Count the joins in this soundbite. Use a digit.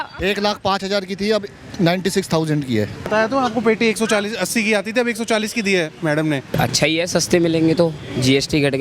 2